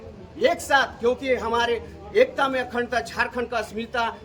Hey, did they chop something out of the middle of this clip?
no; 0 cuts

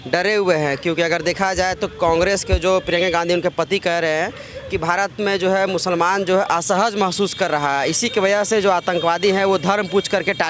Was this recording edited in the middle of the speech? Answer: no; 0 cuts

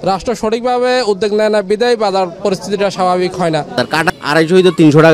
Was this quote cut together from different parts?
yes; 1 cut; at 3.8 s

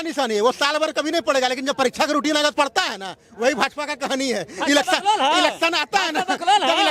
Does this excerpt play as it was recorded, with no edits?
yes; 0 cuts

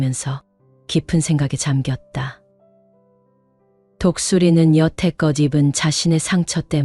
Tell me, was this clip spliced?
yes; 2 cuts; at 2.4 s, 4.0 s

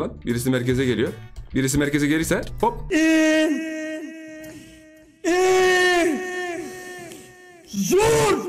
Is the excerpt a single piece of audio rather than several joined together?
yes; 0 cuts

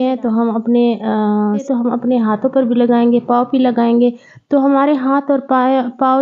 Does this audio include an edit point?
yes; 1 cut; at 1.6 s

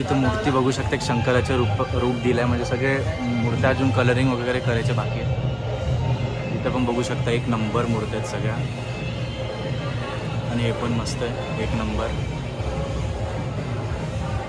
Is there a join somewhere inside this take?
no; 0 cuts

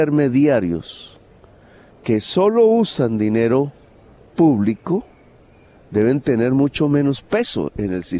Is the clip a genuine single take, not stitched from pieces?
yes; 0 cuts

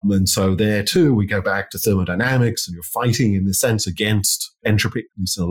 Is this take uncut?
yes; 0 cuts

